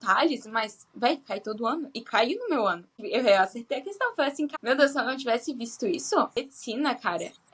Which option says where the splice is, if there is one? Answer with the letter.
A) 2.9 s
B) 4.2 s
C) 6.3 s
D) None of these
C